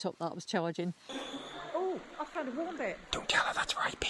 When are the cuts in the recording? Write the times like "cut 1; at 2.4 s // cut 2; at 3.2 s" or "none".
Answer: cut 1; at 1.1 s // cut 2; at 3.0 s